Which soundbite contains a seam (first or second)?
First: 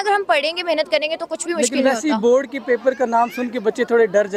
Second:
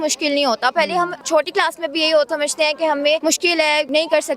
second